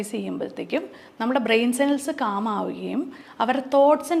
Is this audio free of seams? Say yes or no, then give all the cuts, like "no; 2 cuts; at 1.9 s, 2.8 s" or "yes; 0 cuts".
yes; 0 cuts